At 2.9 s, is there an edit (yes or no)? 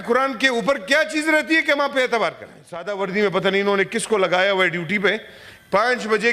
yes